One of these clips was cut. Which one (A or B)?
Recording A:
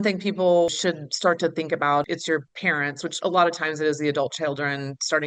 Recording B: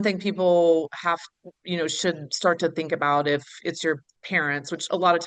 A